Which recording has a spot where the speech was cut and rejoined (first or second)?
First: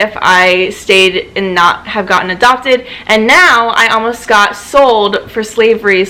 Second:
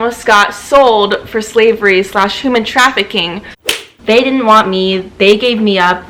second